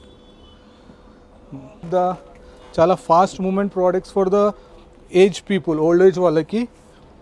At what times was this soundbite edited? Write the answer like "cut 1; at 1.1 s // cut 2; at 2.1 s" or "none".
cut 1; at 1.9 s

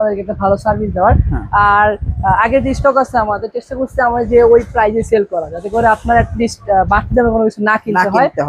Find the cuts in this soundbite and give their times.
none

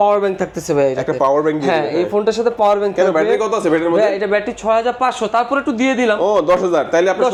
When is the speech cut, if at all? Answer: none

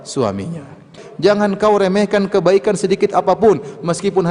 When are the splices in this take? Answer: cut 1; at 1.0 s

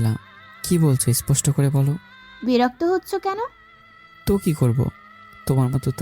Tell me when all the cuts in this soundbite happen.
none

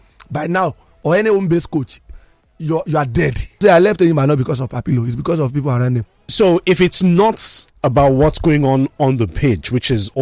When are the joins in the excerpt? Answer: cut 1; at 3.6 s // cut 2; at 6.2 s

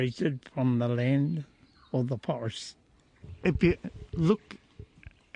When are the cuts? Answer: cut 1; at 3.3 s

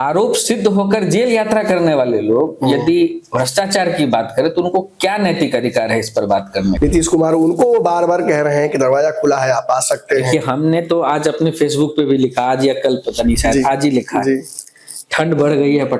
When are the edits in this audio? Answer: cut 1; at 6.8 s

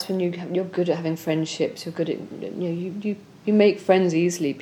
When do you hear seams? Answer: none

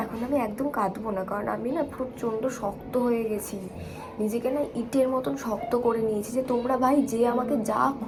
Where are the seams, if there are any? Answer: none

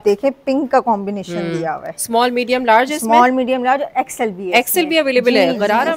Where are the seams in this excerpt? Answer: none

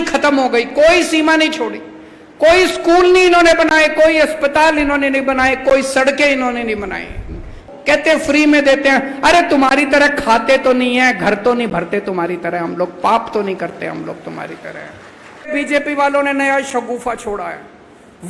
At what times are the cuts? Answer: cut 1; at 15.5 s

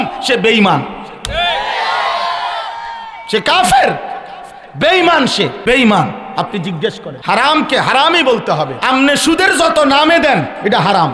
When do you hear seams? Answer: cut 1; at 5.6 s // cut 2; at 7.1 s // cut 3; at 8.8 s

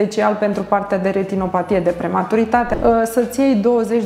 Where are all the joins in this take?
cut 1; at 2.7 s

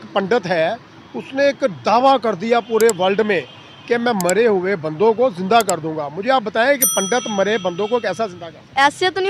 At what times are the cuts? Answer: none

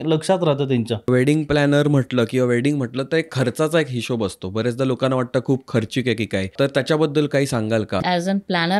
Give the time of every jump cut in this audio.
cut 1; at 1.1 s // cut 2; at 6.5 s // cut 3; at 8.0 s

